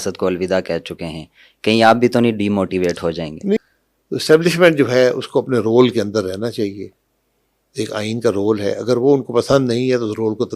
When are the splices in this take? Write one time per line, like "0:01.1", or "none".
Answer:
0:03.6